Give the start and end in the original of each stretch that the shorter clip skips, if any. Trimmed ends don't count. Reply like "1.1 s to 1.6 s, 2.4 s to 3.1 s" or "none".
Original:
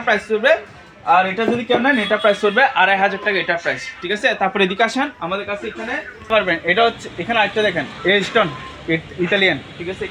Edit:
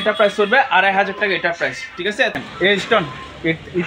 4.4 s to 7.8 s